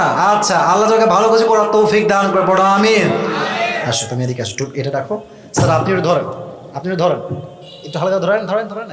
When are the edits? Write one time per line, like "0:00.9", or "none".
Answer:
0:03.7